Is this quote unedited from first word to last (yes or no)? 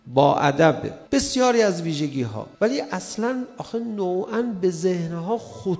no